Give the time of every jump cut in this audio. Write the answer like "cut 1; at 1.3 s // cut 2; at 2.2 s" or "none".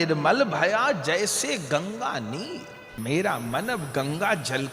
cut 1; at 2.8 s